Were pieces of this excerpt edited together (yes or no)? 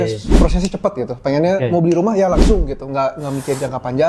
no